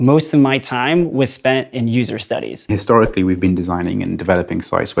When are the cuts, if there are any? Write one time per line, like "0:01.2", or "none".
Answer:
0:02.7